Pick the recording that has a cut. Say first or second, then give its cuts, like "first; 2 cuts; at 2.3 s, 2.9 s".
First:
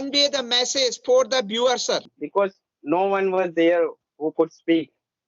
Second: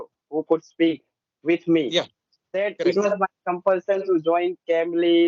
first; 1 cut; at 2.2 s